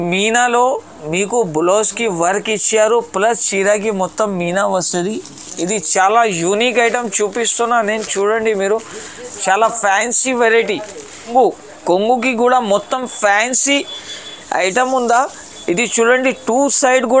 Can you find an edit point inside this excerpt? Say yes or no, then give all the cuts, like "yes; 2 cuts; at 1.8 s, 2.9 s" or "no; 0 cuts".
yes; 1 cut; at 11.3 s